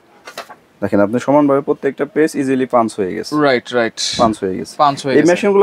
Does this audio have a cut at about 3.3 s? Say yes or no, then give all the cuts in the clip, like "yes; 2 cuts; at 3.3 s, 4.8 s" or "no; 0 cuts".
no; 0 cuts